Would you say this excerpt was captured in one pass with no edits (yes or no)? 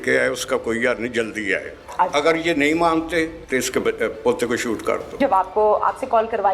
no